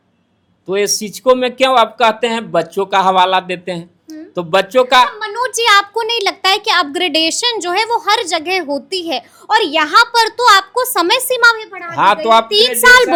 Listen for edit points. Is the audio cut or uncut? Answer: uncut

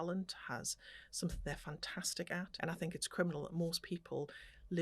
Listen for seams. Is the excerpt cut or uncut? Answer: cut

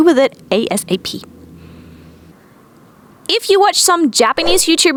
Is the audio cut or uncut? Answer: uncut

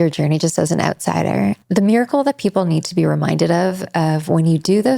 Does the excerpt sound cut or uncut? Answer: cut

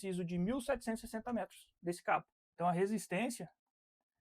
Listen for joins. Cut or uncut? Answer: cut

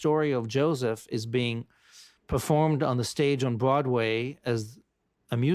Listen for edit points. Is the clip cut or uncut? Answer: uncut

